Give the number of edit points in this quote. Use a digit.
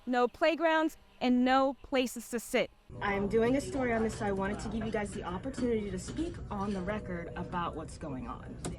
1